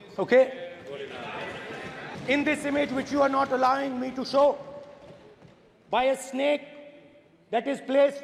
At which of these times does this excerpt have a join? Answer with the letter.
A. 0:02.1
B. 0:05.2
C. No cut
A